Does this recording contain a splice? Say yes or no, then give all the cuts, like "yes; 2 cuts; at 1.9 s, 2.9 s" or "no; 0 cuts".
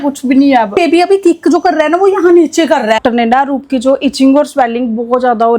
yes; 2 cuts; at 0.7 s, 3.0 s